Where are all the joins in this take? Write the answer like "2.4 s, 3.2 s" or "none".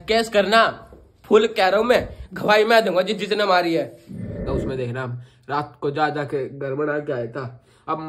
4.4 s